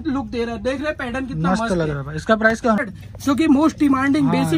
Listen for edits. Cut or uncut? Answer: cut